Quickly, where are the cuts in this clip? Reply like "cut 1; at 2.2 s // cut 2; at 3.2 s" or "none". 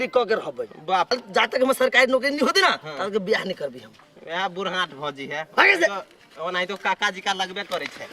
cut 1; at 1.1 s

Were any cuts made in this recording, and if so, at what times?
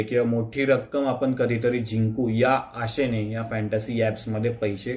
none

